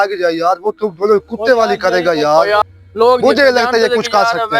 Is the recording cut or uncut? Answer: cut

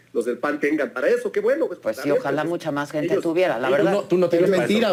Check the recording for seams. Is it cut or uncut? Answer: uncut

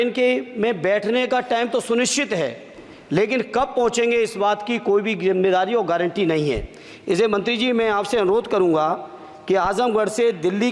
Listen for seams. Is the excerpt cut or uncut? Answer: uncut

